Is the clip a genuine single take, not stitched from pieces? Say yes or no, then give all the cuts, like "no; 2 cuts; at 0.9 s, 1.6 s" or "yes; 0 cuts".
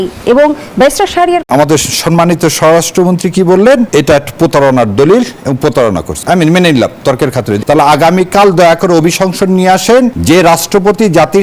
no; 5 cuts; at 1.4 s, 3.9 s, 6.1 s, 7.6 s, 10.2 s